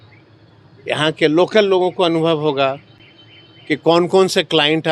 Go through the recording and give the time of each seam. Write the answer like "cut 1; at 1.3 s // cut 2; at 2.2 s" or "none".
none